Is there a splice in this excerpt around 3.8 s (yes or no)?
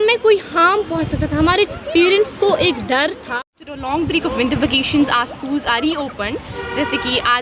yes